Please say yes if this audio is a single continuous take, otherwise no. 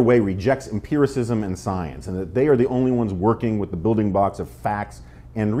yes